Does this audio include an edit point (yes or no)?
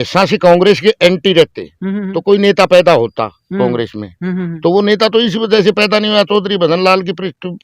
no